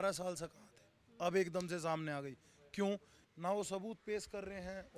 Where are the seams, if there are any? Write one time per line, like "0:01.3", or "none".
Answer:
0:03.2